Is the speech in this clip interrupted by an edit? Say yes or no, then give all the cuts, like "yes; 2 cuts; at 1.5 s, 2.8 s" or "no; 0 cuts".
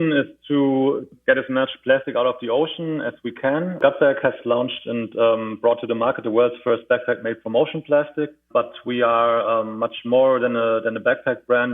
yes; 3 cuts; at 1.1 s, 3.8 s, 8.4 s